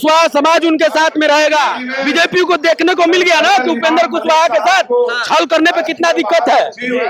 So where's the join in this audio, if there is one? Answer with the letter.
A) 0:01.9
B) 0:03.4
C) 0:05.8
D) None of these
A